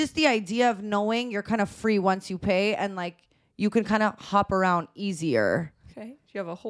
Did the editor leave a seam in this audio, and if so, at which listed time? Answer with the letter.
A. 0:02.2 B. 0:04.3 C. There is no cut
C